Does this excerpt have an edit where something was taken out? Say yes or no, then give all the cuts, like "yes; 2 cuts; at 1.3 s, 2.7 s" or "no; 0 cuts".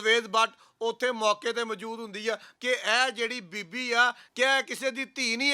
yes; 2 cuts; at 2.5 s, 4.2 s